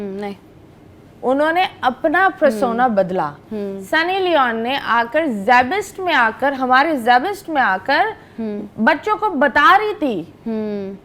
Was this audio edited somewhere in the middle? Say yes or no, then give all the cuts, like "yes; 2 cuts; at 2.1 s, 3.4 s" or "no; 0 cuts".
no; 0 cuts